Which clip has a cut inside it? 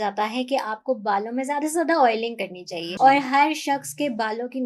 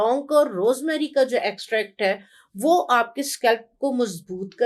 first; 1 cut; at 2.9 s

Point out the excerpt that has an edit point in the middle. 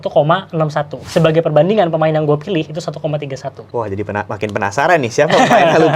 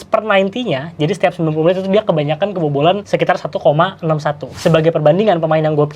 first; 1 cut; at 3.6 s

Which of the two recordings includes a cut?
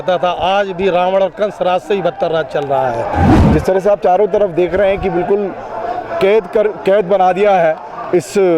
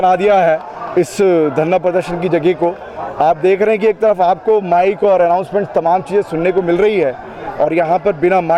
first; 1 cut; at 3.4 s

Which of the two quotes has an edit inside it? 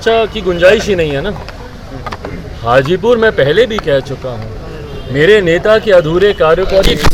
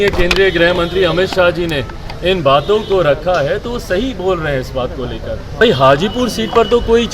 second; 1 cut; at 5.6 s

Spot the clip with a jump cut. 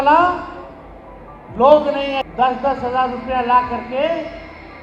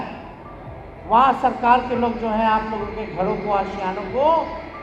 first; 1 cut; at 2.2 s

